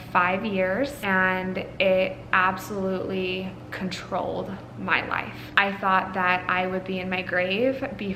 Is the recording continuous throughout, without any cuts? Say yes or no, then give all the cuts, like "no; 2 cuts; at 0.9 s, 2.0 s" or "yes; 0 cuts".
no; 2 cuts; at 1.0 s, 5.4 s